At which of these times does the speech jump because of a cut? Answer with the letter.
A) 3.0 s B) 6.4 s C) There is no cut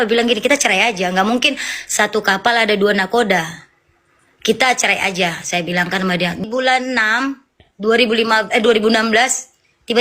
B